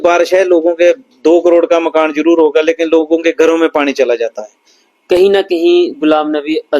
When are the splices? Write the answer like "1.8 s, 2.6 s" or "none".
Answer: 4.8 s